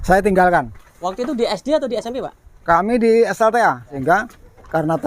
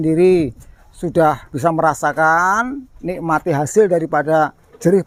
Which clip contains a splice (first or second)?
first